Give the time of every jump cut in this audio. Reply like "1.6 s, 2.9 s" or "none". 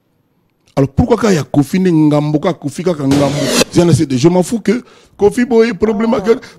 3.6 s